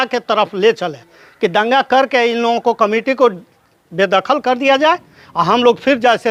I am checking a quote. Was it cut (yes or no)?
no